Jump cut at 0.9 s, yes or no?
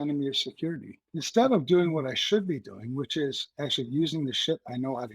yes